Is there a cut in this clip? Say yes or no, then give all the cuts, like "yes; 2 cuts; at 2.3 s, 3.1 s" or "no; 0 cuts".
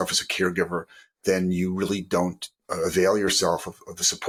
no; 0 cuts